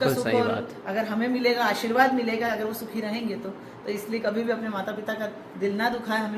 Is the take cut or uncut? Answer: uncut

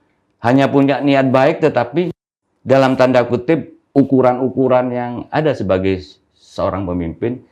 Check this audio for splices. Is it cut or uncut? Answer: cut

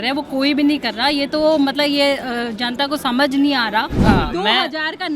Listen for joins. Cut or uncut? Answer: cut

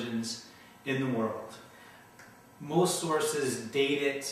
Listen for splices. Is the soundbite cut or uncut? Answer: uncut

